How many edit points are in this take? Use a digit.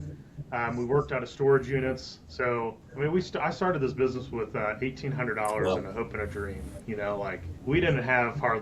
2